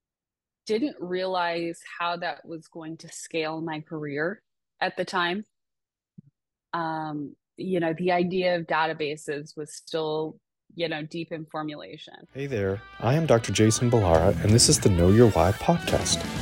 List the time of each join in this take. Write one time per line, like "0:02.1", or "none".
0:12.4